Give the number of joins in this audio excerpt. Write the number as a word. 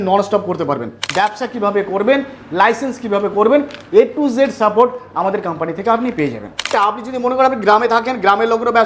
two